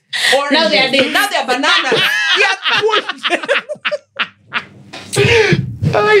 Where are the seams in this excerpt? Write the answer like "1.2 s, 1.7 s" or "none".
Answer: none